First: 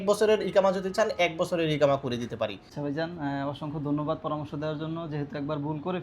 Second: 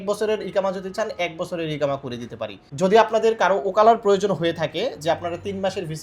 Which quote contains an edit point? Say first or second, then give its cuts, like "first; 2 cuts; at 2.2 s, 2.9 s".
first; 1 cut; at 2.6 s